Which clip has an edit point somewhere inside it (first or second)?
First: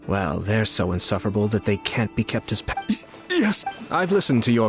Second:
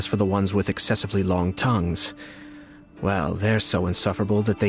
first